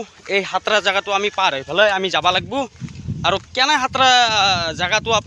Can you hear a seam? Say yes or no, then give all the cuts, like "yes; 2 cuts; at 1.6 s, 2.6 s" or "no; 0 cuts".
no; 0 cuts